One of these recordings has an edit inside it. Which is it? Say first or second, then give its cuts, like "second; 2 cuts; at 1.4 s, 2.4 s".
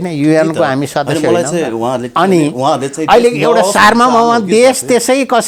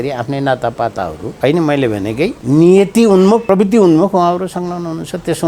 second; 3 cuts; at 1.2 s, 2.4 s, 3.4 s